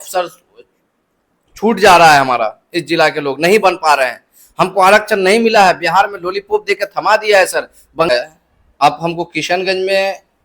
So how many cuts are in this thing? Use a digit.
1